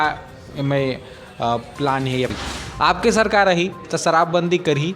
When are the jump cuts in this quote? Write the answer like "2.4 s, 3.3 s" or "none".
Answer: 2.4 s